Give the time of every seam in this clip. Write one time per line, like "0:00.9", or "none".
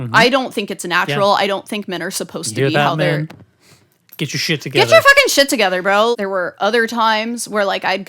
0:06.2